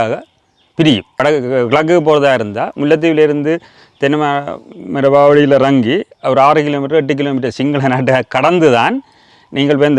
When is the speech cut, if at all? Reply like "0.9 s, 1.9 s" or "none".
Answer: 1.2 s